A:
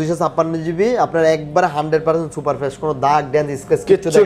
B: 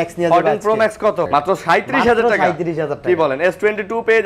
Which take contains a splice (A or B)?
B